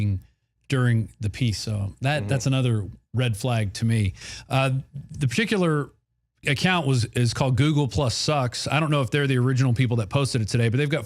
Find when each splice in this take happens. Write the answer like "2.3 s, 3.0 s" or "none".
1.5 s